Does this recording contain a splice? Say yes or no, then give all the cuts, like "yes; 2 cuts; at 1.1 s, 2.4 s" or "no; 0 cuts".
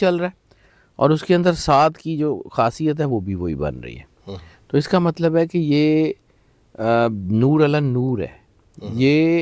no; 0 cuts